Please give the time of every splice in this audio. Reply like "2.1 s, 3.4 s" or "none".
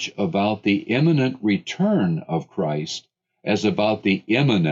none